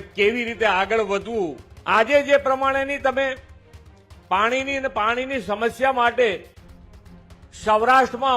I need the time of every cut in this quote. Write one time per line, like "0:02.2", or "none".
0:01.7